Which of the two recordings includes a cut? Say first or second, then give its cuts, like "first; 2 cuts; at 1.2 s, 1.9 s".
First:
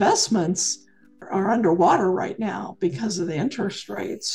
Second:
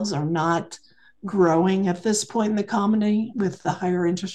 first; 1 cut; at 1.2 s